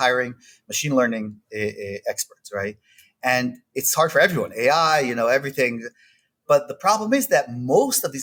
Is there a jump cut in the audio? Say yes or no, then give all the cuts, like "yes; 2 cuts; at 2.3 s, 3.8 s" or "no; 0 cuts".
no; 0 cuts